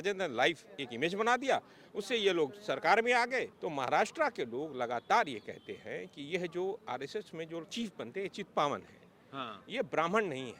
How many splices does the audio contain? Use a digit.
1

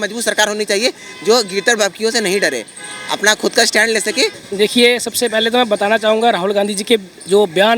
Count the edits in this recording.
1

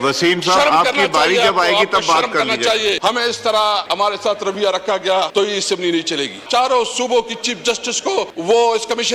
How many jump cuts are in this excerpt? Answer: 5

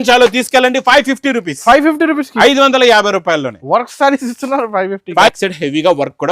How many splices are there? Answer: 1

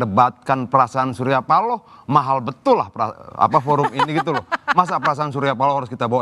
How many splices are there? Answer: 0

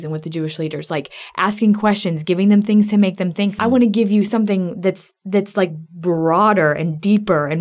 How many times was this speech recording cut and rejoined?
1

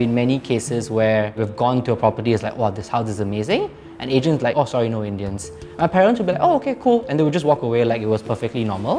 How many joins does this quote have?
1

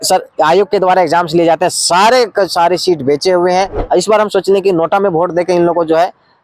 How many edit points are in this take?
1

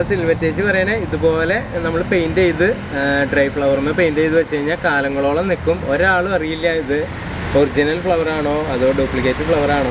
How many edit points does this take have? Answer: 0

